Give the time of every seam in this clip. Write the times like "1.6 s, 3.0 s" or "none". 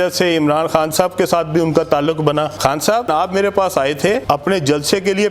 3.1 s, 4.2 s